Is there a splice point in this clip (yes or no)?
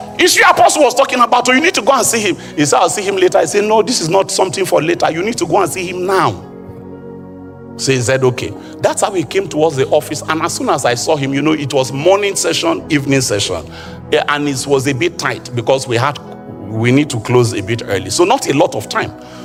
no